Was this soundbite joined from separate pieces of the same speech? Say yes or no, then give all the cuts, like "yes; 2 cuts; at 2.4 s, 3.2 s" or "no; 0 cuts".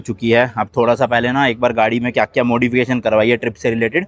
no; 0 cuts